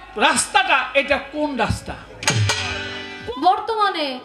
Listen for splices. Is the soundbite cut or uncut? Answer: cut